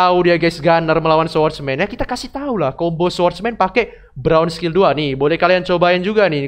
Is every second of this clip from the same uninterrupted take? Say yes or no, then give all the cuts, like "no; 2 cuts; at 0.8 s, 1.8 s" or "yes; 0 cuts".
yes; 0 cuts